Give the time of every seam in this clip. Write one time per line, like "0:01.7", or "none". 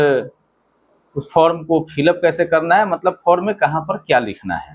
none